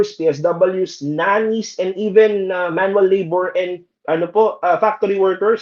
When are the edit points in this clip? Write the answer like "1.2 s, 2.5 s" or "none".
none